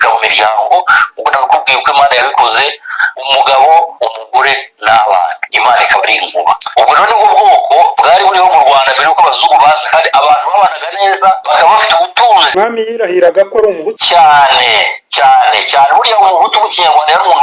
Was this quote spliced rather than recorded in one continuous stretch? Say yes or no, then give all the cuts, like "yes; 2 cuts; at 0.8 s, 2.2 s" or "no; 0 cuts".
yes; 1 cut; at 12.5 s